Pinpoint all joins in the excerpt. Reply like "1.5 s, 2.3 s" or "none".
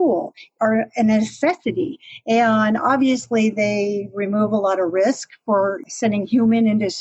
none

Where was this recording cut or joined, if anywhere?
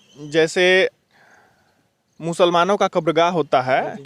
none

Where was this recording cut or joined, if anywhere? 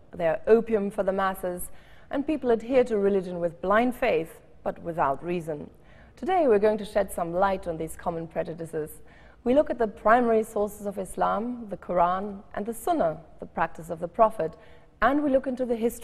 13.3 s

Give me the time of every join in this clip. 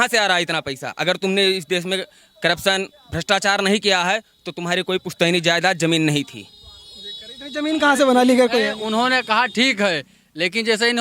none

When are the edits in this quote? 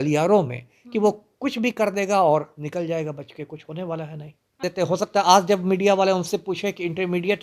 4.6 s

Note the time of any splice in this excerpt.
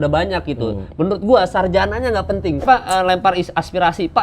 2.6 s

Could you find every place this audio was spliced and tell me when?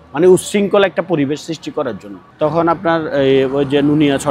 none

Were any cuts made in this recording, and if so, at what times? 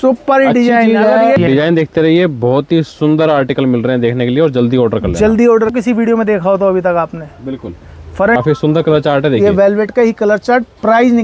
1.4 s, 5.7 s, 8.4 s

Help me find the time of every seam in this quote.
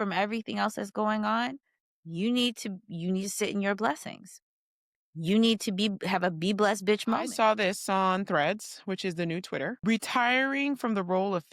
7.3 s, 9.8 s

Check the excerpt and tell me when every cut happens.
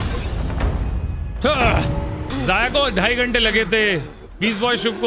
2.3 s

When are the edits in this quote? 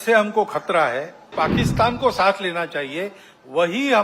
1.3 s

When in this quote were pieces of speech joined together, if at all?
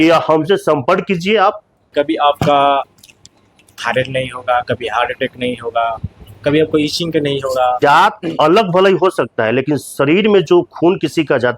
1.8 s, 7.8 s

